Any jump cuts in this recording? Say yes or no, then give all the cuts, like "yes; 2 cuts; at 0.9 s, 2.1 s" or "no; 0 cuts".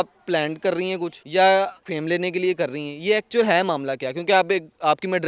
yes; 2 cuts; at 1.2 s, 1.8 s